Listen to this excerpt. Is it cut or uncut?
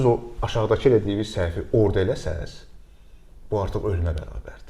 uncut